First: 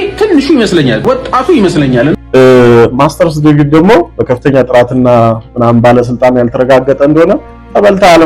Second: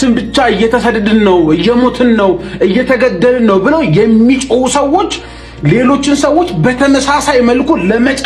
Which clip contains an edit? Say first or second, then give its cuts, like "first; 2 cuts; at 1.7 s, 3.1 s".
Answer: first; 2 cuts; at 1.0 s, 2.2 s